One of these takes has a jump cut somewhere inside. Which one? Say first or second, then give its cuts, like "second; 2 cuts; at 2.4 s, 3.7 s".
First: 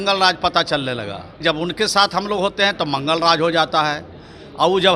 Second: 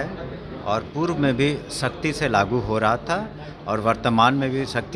first; 1 cut; at 1.4 s